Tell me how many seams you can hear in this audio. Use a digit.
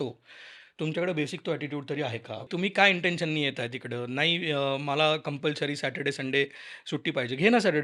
1